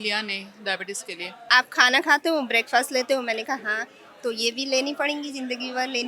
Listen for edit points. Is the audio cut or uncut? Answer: cut